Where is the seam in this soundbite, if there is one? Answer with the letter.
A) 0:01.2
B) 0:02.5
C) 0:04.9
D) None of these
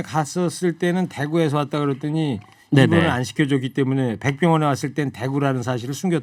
D